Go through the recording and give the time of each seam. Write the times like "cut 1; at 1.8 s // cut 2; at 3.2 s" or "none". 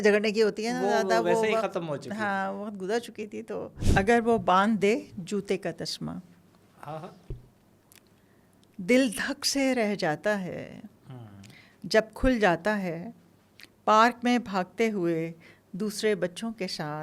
cut 1; at 3.8 s